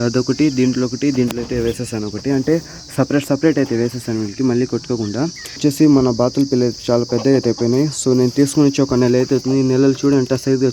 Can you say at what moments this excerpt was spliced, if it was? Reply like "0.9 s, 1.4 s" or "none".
5.6 s